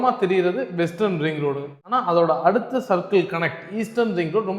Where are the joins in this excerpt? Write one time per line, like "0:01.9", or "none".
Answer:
0:01.7